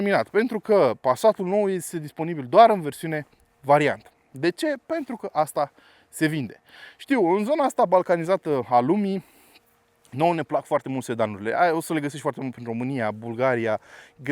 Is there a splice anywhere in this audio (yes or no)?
no